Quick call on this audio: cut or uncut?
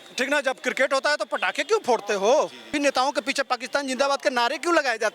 cut